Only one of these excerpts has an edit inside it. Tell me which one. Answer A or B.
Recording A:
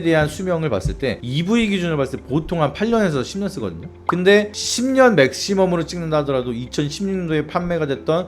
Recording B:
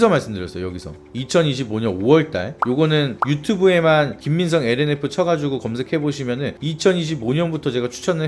A